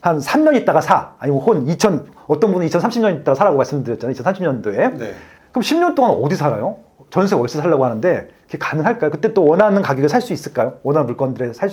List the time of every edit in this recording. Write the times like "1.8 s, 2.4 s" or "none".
none